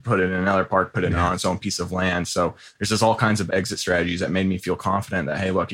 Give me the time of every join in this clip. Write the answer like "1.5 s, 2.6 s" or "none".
3.4 s